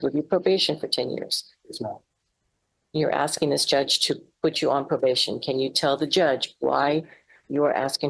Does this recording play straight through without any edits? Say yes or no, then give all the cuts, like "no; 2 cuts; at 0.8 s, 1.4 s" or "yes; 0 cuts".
yes; 0 cuts